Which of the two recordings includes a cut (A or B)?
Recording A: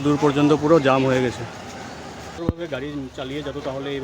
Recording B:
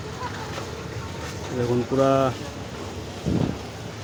A